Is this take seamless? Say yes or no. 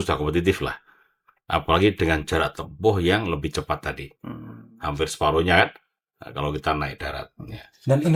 yes